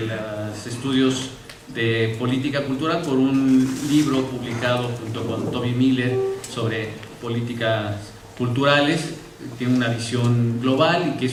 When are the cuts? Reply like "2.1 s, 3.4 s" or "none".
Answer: none